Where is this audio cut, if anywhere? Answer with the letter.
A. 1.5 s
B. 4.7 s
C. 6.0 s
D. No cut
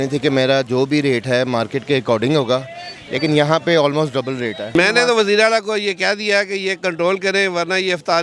B